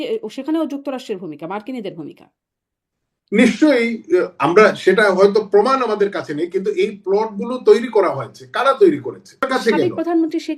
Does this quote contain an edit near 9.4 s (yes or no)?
yes